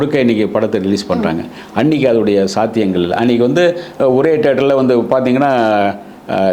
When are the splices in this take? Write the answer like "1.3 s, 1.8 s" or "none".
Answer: none